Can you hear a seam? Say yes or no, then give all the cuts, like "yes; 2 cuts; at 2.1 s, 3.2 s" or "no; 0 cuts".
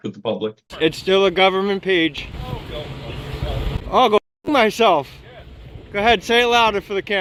no; 0 cuts